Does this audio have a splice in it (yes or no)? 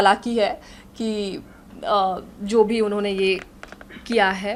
no